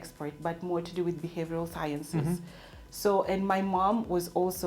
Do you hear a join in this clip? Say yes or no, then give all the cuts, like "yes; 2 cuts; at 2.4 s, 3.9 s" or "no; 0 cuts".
no; 0 cuts